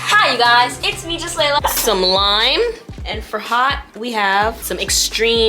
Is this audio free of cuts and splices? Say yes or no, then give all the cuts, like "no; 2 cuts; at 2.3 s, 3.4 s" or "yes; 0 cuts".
no; 3 cuts; at 1.6 s, 2.9 s, 4.7 s